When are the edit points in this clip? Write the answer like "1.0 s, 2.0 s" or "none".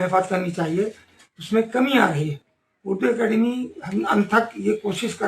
none